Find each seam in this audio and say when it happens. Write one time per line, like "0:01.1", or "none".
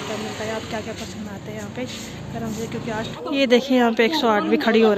0:03.1